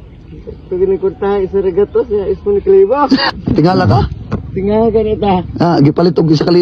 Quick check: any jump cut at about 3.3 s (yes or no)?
yes